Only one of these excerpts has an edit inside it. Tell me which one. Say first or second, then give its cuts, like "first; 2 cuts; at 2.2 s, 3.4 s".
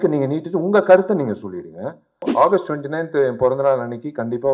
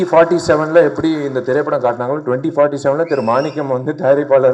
first; 1 cut; at 2.3 s